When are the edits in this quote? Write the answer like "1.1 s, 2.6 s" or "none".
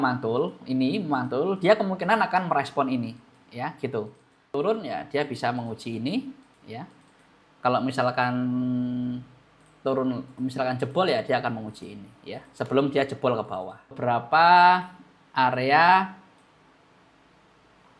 4.5 s, 13.9 s